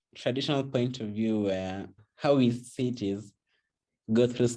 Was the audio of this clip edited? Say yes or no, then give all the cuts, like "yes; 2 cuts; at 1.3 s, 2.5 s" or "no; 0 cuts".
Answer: yes; 1 cut; at 2.0 s